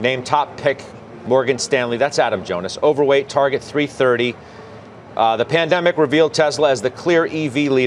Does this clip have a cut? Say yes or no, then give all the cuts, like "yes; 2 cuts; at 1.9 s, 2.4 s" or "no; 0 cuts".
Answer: no; 0 cuts